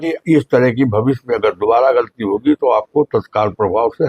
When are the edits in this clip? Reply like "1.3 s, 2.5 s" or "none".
none